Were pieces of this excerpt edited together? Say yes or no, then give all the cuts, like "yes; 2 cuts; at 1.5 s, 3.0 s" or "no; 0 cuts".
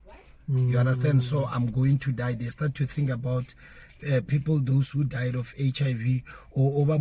no; 0 cuts